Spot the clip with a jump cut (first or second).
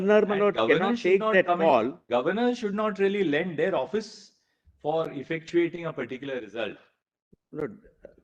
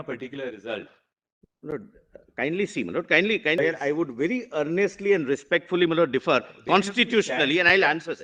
second